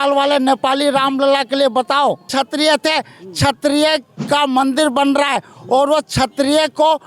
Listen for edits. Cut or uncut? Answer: cut